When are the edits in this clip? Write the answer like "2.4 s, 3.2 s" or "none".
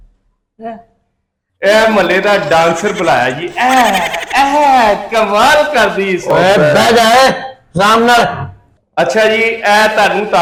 none